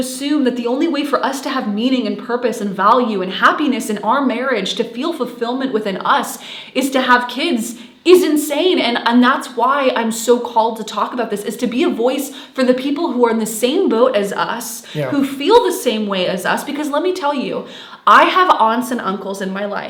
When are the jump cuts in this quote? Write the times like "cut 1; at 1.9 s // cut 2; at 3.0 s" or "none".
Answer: none